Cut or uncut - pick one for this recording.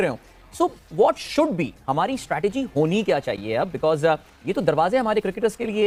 uncut